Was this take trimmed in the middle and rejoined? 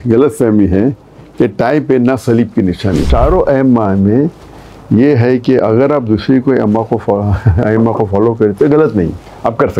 yes; 1 cut; at 3.1 s

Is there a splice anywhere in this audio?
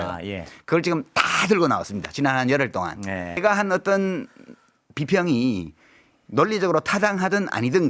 yes; 1 cut; at 3.4 s

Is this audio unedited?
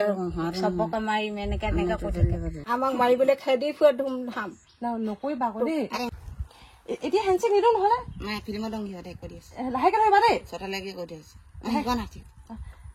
no; 2 cuts; at 2.5 s, 6.1 s

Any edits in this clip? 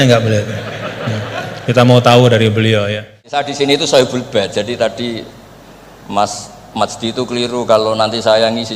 yes; 1 cut; at 3.2 s

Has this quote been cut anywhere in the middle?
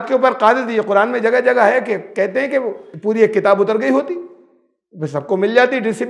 yes; 1 cut; at 2.8 s

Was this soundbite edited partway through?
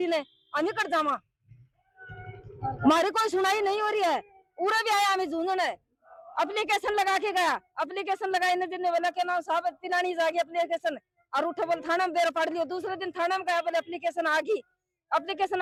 no; 0 cuts

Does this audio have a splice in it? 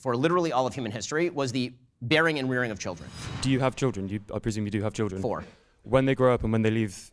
yes; 1 cut; at 3.1 s

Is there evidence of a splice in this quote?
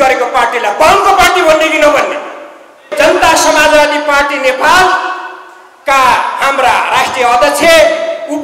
yes; 1 cut; at 2.9 s

